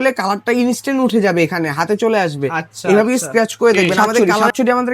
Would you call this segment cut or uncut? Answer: cut